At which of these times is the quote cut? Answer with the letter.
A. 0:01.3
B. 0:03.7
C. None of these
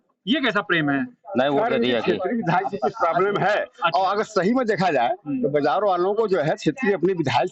C